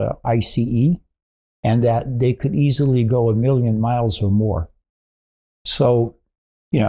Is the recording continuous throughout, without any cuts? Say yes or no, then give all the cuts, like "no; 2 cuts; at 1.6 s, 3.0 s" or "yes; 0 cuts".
yes; 0 cuts